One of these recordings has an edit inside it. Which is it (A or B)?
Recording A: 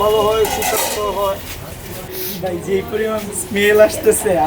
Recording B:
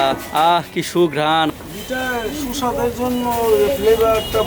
A